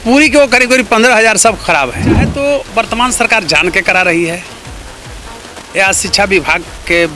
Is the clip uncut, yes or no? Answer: no